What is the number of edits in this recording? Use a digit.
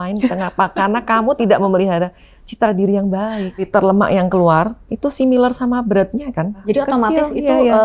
2